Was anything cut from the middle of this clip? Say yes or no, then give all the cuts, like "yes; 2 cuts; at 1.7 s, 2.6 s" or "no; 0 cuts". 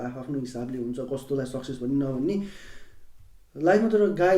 no; 0 cuts